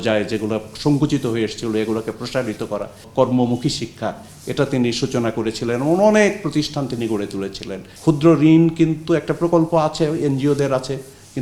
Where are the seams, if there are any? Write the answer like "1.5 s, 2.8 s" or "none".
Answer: 3.0 s, 7.8 s